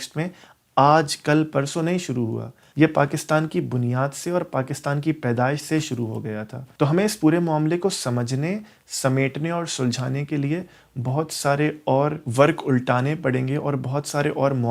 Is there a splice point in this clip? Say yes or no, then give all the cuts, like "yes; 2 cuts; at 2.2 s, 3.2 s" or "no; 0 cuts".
no; 0 cuts